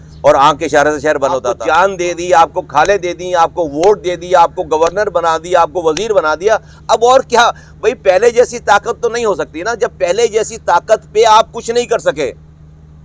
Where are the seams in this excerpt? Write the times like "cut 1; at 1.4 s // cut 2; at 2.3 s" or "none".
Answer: cut 1; at 1.5 s